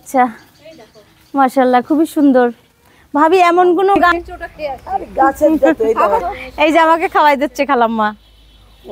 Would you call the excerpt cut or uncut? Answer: cut